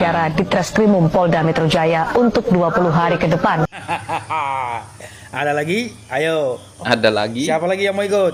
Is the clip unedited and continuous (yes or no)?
yes